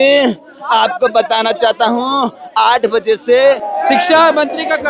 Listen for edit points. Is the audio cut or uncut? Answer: cut